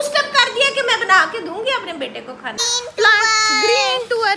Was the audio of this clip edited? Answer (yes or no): yes